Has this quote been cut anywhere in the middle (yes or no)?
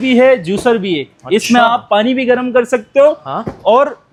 no